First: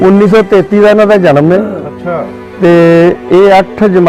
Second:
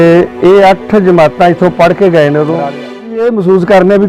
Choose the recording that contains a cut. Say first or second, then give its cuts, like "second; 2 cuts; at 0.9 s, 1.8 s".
second; 1 cut; at 2.8 s